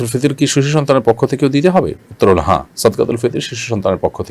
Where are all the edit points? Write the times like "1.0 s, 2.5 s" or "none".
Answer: none